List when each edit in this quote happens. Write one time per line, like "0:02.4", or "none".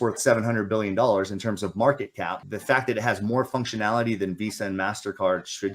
0:02.5

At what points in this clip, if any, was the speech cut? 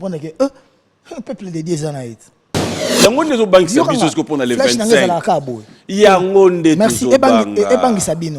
0:02.8

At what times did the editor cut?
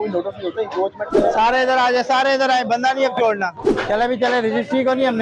0:01.1
0:03.7

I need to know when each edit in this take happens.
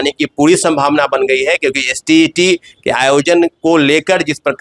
none

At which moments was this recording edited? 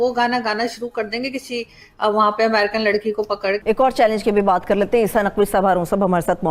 none

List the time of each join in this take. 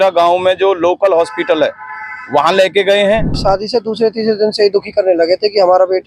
0:03.4

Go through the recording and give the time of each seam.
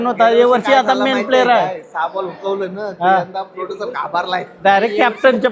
none

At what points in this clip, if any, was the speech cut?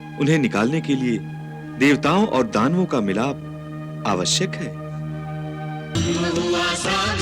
0:05.9

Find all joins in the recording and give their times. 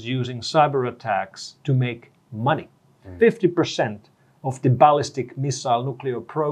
0:03.0

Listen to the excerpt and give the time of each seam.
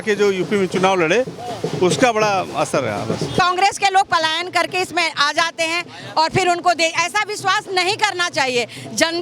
0:03.3

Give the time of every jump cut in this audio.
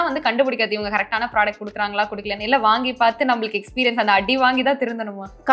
none

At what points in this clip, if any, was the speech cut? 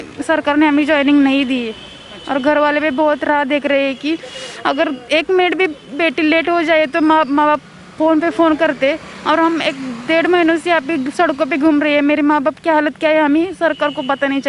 none

